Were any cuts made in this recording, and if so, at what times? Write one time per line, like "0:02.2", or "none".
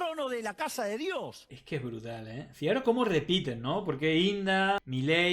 0:01.5